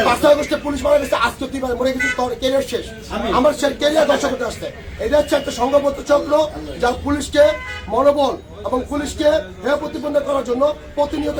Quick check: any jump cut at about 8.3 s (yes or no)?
no